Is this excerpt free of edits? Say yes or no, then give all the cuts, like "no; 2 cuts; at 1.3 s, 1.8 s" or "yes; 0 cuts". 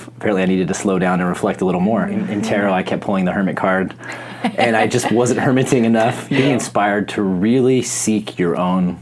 no; 2 cuts; at 2.2 s, 6.3 s